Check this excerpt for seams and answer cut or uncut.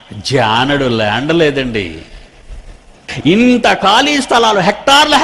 cut